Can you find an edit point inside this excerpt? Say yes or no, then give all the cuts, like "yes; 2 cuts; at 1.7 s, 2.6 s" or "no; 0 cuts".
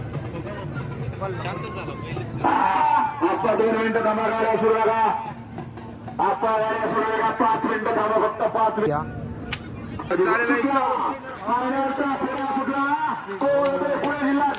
yes; 1 cut; at 8.9 s